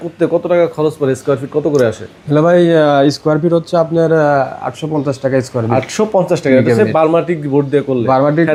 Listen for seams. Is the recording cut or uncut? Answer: uncut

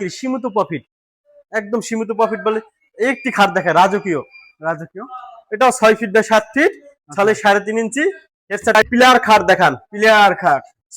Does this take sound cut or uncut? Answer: cut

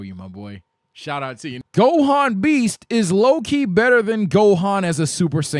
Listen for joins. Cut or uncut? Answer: cut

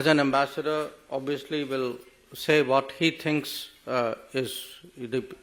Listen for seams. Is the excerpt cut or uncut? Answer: uncut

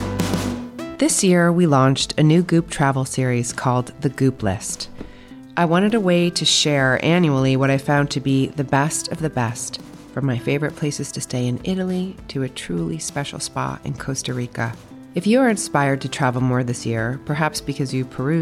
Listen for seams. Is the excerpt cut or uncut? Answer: cut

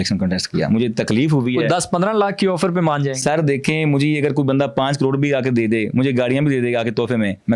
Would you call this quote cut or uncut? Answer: uncut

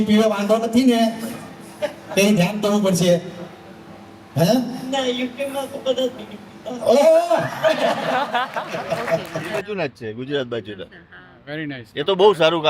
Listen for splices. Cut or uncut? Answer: cut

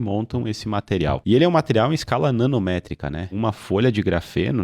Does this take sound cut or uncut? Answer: cut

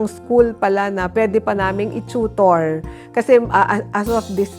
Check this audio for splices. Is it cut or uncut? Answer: uncut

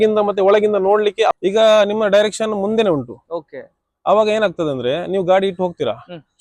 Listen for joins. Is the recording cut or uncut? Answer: cut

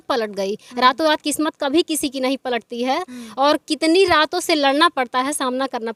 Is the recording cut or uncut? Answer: uncut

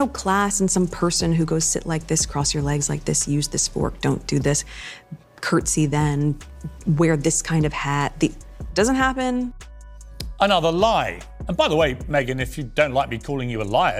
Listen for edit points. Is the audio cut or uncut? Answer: uncut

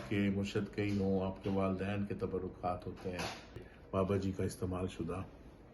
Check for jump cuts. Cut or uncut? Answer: cut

